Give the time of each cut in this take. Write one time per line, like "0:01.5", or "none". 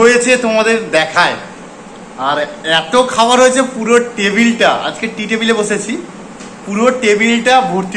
none